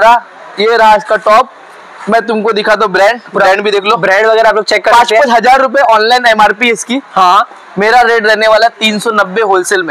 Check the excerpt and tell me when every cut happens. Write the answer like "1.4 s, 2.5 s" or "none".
none